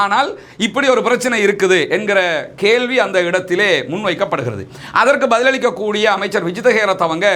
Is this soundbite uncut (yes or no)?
yes